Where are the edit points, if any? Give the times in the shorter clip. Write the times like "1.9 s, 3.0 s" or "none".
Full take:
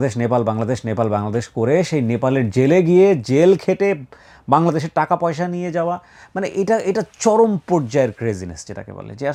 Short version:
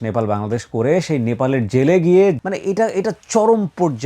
2.4 s